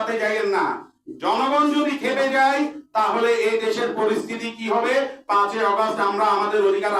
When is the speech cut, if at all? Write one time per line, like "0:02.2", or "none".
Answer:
none